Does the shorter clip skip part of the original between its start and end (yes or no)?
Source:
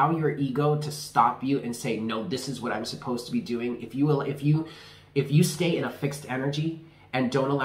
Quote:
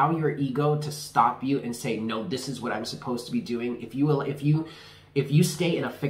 no